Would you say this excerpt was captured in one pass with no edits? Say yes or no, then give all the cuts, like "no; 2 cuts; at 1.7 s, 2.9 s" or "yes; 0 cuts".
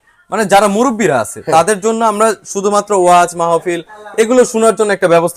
yes; 0 cuts